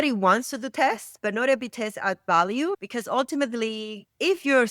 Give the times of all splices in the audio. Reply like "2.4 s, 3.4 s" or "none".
2.8 s